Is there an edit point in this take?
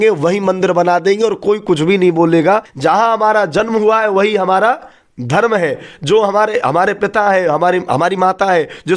yes; 1 cut; at 2.7 s

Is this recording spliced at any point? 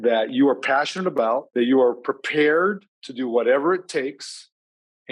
yes; 1 cut; at 1.5 s

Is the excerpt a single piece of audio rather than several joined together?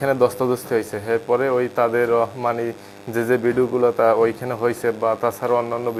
yes; 0 cuts

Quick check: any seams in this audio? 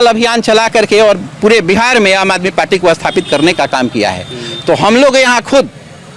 no; 0 cuts

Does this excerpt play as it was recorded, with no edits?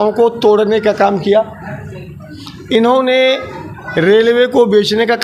yes; 0 cuts

